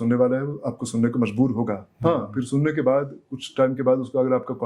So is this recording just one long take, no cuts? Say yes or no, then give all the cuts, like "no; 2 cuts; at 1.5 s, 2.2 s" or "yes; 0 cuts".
yes; 0 cuts